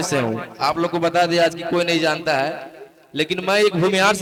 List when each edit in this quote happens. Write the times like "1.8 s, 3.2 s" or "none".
none